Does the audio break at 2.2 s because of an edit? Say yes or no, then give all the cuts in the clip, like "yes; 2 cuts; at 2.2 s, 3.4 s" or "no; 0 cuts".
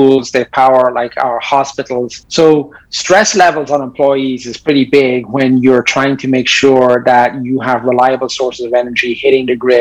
yes; 1 cut; at 2.2 s